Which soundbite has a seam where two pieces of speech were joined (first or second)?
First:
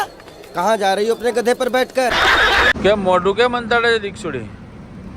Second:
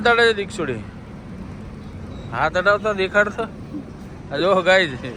first